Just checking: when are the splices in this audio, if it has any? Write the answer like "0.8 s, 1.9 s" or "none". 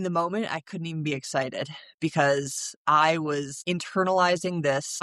none